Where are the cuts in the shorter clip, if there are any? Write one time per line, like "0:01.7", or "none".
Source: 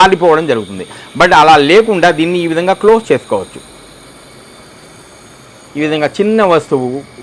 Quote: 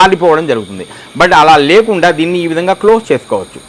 none